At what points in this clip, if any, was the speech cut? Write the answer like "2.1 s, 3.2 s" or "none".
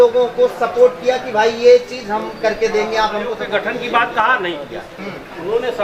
3.4 s